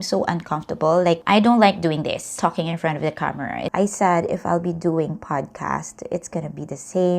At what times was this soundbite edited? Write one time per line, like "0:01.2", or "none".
0:01.2
0:02.3
0:03.7